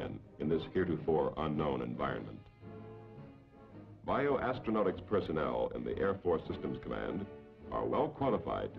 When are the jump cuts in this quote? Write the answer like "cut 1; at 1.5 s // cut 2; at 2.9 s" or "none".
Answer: cut 1; at 5.0 s